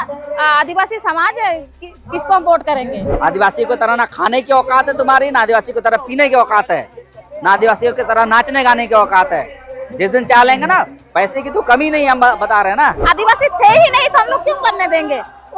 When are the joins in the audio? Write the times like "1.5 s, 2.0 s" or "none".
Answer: 3.1 s, 13.0 s